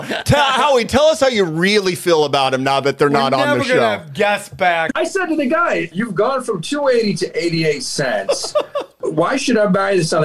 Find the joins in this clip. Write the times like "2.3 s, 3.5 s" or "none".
4.9 s, 5.9 s, 9.0 s